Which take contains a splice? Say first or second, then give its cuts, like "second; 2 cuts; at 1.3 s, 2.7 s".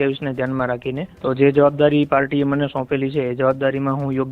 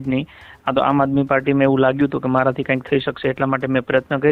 first; 1 cut; at 1.1 s